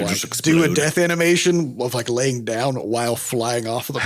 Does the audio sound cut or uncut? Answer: uncut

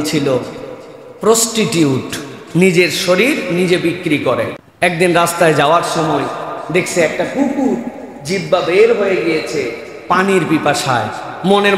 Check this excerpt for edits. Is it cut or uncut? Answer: cut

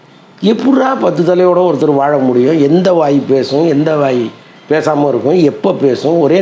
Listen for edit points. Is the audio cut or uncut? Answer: uncut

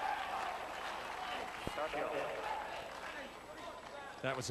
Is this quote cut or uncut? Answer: uncut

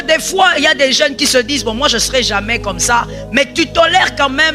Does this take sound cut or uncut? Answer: uncut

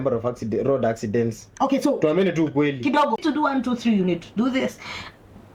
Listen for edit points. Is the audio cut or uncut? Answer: cut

